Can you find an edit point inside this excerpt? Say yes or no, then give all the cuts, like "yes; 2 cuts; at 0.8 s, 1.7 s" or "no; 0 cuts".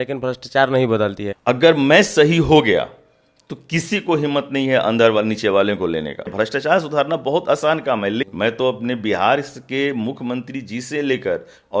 yes; 3 cuts; at 1.3 s, 6.3 s, 8.3 s